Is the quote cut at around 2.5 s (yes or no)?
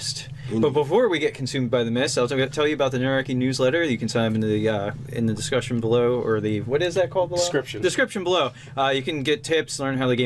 yes